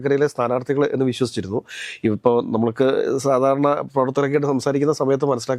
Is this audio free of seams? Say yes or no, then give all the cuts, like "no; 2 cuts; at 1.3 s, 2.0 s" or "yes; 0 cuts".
yes; 0 cuts